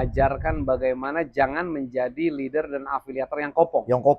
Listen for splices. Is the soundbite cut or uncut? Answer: uncut